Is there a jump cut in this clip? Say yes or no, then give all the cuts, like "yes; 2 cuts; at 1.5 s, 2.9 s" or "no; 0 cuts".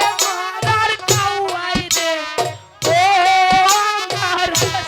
no; 0 cuts